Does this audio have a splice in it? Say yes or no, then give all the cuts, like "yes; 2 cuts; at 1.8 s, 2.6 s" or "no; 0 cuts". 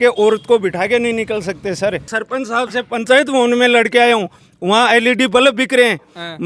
no; 0 cuts